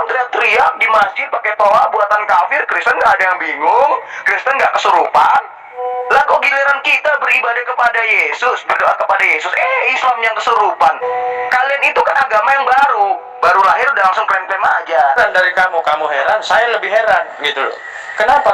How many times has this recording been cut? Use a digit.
2